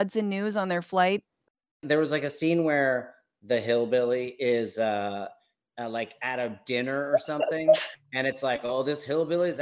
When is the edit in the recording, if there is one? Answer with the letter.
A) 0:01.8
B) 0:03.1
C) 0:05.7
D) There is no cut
A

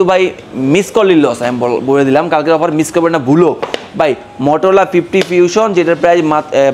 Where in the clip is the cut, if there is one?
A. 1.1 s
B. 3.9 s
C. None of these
C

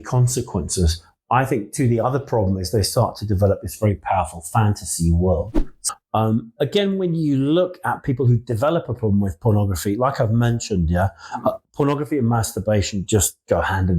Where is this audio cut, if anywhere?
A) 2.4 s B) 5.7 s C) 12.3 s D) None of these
B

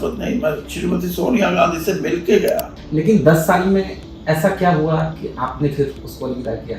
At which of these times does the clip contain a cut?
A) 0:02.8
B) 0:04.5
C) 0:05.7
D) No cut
A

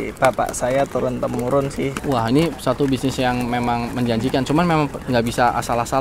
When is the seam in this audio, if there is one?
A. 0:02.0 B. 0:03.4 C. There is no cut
A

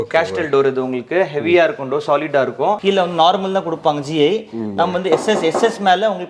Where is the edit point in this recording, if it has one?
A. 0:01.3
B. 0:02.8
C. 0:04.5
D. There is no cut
B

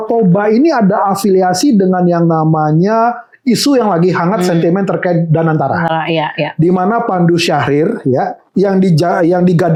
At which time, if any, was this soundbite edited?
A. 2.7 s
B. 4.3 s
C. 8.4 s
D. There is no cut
D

